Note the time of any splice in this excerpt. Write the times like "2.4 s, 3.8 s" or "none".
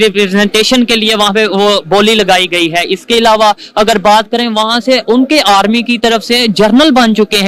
none